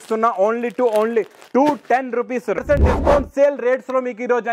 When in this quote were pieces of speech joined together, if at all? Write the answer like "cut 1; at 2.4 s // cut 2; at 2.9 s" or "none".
cut 1; at 2.6 s